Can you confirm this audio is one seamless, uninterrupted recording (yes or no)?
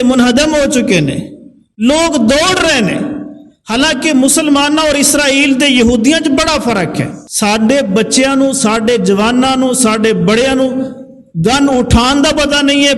no